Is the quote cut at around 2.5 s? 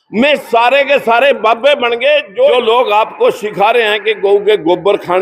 yes; 1 cut; at 2.5 s

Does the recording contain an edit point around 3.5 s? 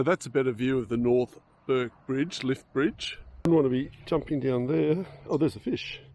yes; 1 cut; at 3.5 s

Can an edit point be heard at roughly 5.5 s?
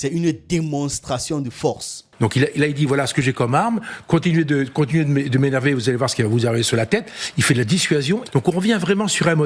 no; 2 cuts; at 2.0 s, 8.2 s

